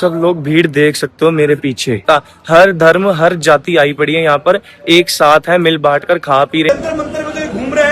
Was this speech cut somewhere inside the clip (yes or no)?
yes